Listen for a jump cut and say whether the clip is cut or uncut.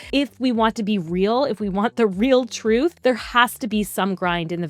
cut